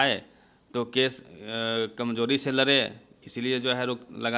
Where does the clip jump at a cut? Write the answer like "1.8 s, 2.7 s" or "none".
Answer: none